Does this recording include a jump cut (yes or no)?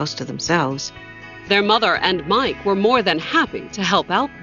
no